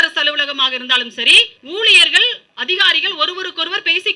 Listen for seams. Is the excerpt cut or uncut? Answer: cut